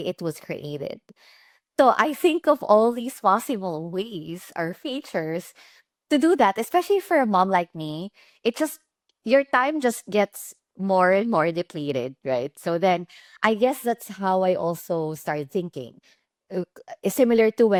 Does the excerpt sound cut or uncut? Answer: uncut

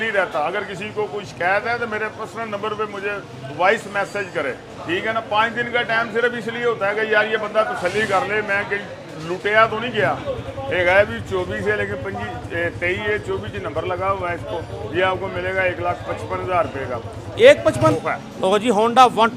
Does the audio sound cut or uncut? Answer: cut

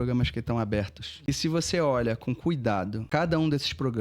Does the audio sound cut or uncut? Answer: cut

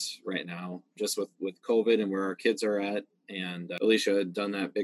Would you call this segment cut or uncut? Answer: uncut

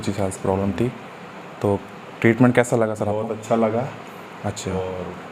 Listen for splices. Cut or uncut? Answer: uncut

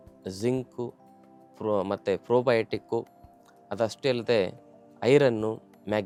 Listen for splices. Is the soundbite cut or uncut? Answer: uncut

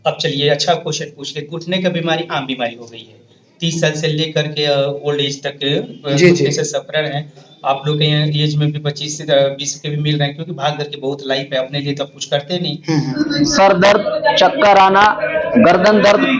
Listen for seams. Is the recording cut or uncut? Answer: cut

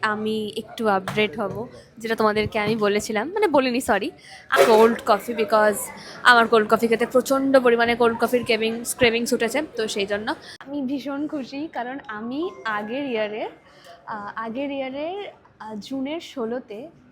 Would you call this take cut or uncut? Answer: cut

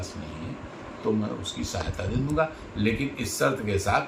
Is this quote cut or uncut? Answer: uncut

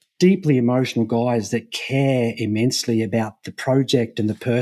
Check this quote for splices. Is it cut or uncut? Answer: uncut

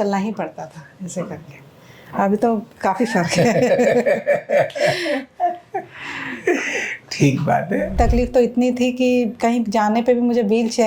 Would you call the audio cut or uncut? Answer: cut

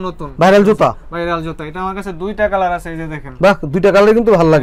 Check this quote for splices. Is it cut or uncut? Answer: uncut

